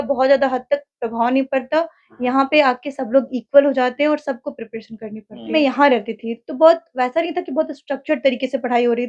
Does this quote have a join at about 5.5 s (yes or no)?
yes